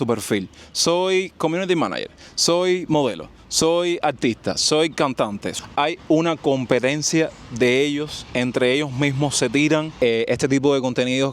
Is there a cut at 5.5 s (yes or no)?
yes